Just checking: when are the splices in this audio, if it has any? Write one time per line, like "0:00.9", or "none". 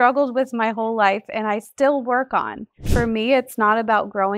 0:02.9